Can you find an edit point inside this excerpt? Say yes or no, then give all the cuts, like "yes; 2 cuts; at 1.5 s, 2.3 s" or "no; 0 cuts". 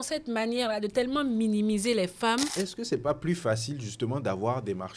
yes; 1 cut; at 2.5 s